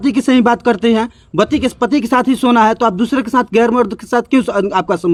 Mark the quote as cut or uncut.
uncut